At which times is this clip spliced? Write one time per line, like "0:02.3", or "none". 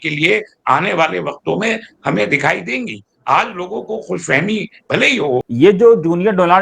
0:05.5